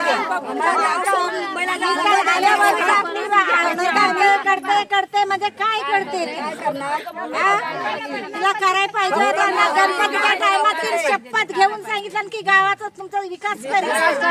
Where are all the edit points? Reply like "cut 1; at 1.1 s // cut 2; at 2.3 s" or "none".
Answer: none